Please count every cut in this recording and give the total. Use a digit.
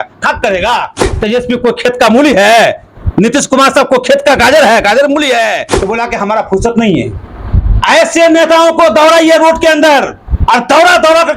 2